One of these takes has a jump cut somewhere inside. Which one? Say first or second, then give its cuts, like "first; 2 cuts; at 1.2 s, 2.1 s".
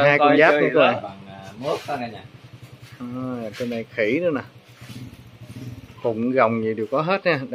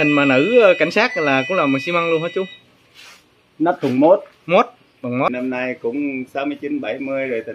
second; 1 cut; at 5.3 s